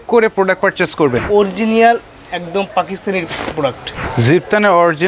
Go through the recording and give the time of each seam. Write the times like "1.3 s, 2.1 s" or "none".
1.2 s, 4.0 s